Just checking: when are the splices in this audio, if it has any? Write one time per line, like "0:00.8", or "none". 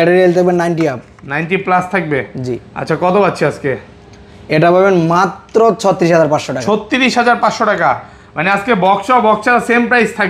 none